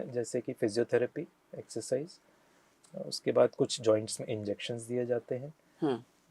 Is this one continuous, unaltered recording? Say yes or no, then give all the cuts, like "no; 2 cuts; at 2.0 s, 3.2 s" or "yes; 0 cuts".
yes; 0 cuts